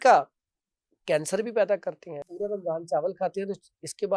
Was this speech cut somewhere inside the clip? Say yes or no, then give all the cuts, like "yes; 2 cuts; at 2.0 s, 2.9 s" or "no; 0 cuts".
yes; 1 cut; at 2.3 s